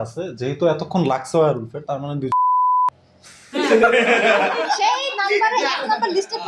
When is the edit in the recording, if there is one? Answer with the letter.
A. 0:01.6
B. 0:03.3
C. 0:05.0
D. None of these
D